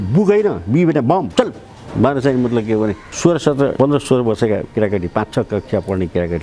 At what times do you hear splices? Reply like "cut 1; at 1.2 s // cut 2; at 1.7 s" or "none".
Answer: cut 1; at 1.3 s // cut 2; at 3.1 s // cut 3; at 3.7 s